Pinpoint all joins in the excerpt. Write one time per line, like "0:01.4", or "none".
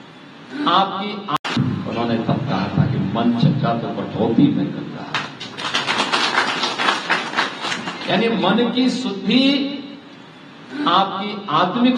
0:01.4

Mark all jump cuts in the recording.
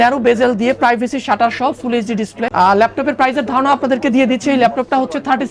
none

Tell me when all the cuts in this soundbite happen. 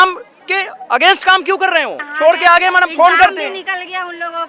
0:02.0

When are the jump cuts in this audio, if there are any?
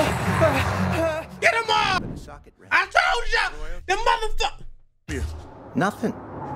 0:02.0

